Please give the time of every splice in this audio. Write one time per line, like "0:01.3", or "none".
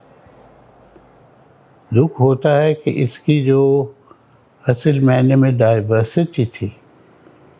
none